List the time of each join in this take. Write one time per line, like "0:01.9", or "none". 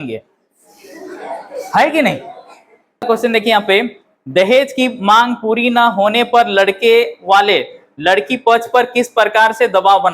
0:03.0